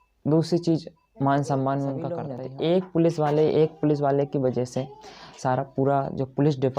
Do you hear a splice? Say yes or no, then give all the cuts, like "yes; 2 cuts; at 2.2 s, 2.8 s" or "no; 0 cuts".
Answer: yes; 1 cut; at 2.4 s